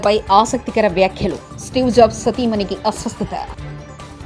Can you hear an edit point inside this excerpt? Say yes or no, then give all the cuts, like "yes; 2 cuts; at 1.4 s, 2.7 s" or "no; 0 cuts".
no; 0 cuts